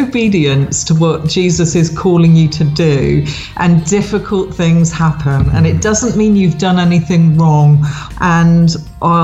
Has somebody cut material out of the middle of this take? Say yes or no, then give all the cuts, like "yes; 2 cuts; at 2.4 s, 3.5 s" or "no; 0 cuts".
yes; 1 cut; at 8.0 s